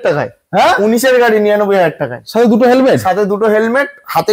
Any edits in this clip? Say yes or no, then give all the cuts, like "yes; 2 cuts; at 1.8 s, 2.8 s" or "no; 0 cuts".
no; 0 cuts